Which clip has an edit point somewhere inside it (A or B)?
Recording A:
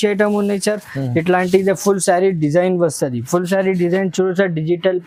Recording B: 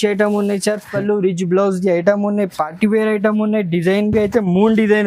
B